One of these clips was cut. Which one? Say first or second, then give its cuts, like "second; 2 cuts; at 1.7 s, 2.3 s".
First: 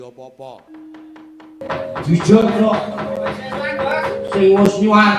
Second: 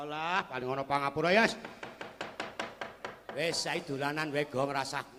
first; 1 cut; at 1.6 s